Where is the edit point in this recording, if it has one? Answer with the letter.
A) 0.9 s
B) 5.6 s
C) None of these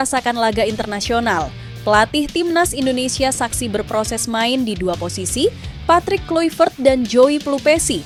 C